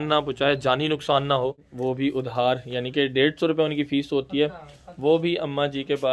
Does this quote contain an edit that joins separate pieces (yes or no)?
yes